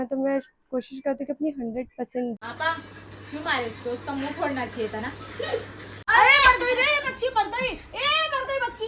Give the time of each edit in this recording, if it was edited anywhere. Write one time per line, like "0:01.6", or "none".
0:02.4
0:06.1